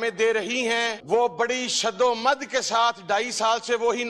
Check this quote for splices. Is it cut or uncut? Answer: cut